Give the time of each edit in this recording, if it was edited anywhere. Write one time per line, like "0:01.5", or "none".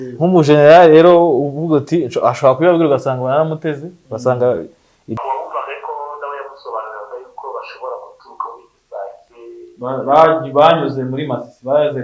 0:05.2